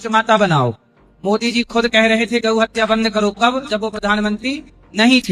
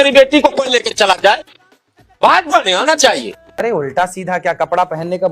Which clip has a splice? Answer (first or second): second